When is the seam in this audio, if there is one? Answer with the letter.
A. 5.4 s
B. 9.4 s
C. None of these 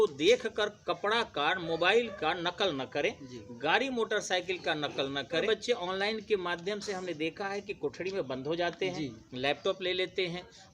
A